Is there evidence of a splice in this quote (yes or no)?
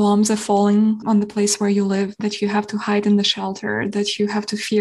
no